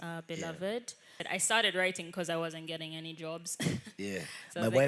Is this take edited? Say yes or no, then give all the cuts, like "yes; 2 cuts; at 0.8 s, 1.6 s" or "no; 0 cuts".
yes; 1 cut; at 1.2 s